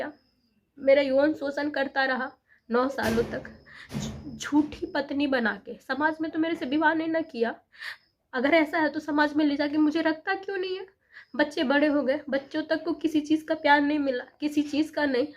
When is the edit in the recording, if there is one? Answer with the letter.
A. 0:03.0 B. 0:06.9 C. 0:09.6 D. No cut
D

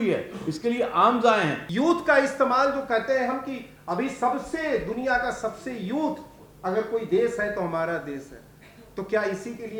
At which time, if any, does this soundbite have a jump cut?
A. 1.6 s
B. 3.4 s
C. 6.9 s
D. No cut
A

